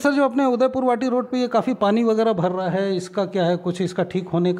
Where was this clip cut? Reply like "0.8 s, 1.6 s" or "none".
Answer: none